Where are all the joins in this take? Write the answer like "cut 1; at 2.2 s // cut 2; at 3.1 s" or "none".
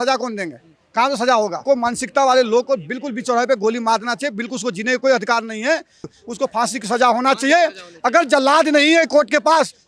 cut 1; at 1.6 s // cut 2; at 6.1 s